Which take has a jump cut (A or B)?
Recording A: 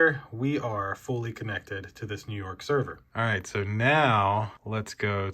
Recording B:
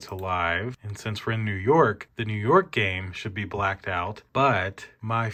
A